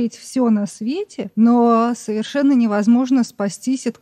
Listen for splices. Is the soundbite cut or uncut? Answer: cut